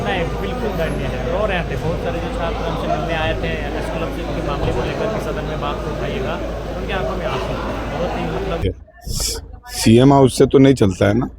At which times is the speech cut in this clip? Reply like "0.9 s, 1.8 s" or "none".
8.6 s